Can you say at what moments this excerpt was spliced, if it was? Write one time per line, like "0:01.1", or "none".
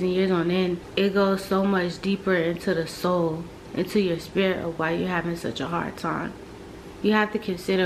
none